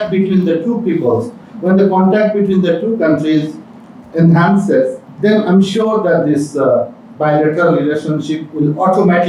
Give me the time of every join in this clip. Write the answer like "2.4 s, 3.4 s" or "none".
none